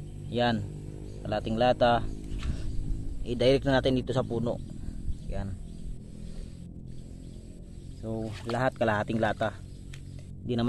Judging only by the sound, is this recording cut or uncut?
uncut